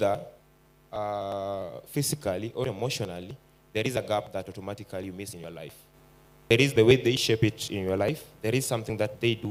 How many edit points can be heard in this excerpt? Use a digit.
0